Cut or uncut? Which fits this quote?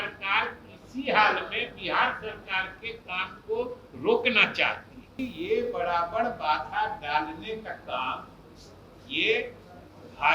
cut